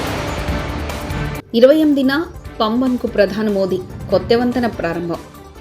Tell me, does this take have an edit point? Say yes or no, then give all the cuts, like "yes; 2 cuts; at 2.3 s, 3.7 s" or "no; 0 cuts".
yes; 1 cut; at 1.4 s